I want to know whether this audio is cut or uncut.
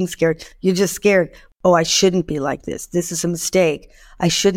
cut